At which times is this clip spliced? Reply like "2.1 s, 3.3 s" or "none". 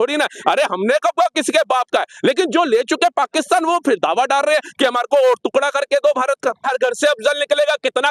6.7 s